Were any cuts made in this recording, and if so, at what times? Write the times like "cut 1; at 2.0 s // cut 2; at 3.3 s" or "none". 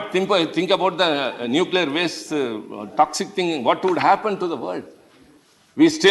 none